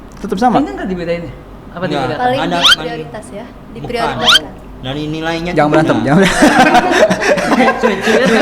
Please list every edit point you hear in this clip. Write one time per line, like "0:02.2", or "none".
none